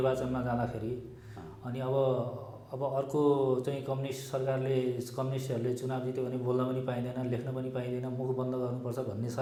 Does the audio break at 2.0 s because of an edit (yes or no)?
no